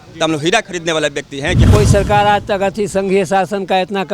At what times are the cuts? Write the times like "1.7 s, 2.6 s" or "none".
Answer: 1.7 s